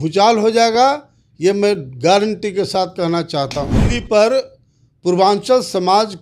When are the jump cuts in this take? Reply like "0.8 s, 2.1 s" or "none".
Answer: 3.8 s